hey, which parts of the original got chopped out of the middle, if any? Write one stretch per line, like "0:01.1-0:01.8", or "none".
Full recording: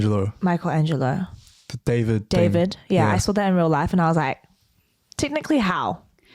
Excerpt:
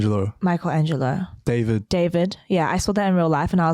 0:01.3-0:01.7